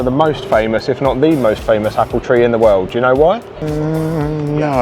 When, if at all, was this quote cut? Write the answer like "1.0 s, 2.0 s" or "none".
3.6 s

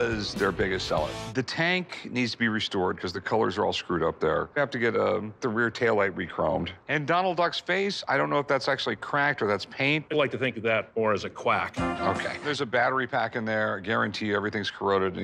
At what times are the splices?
none

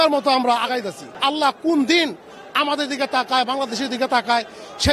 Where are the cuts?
1.1 s

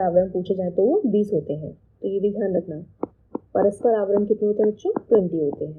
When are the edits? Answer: none

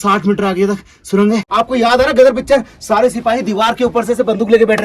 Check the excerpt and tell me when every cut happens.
1.5 s

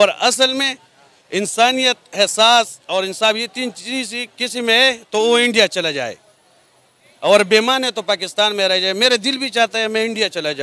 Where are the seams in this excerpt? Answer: none

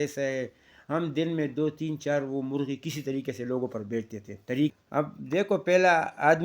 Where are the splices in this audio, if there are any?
4.8 s

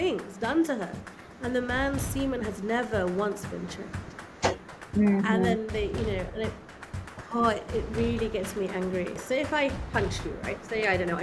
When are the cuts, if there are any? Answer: 9.2 s

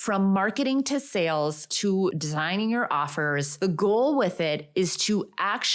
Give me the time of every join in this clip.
1.9 s, 3.5 s

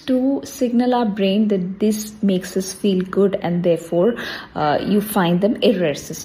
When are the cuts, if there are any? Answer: none

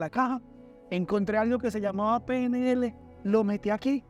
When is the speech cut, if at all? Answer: none

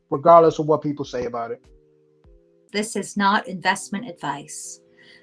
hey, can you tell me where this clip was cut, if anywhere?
2.6 s

